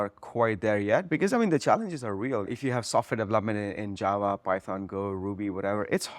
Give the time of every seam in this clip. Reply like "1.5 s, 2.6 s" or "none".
2.5 s